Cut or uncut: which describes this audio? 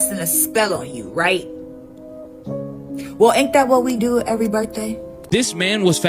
cut